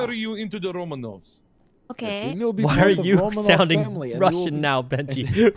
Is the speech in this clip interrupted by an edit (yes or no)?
no